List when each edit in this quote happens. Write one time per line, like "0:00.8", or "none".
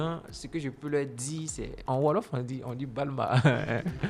0:01.8